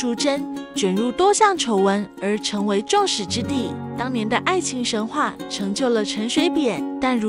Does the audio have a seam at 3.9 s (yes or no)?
yes